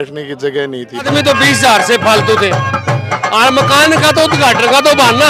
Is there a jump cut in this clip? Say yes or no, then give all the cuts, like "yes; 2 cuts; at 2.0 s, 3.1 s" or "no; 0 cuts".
yes; 1 cut; at 1.0 s